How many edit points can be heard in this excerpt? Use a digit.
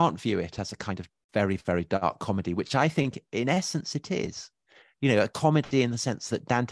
0